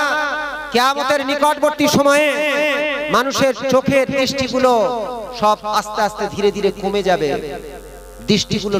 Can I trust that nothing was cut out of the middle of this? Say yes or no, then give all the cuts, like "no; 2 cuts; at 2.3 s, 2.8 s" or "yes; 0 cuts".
yes; 0 cuts